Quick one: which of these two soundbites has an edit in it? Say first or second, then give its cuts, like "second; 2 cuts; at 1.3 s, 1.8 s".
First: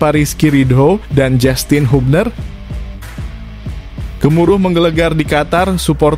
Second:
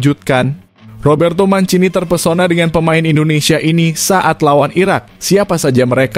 first; 2 cuts; at 2.4 s, 4.2 s